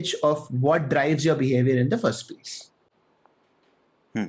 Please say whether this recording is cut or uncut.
uncut